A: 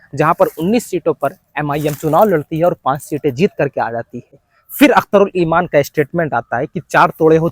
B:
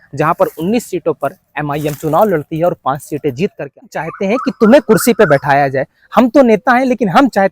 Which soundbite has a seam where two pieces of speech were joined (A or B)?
B